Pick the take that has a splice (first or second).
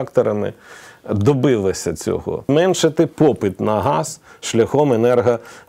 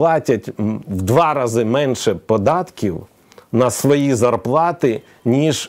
first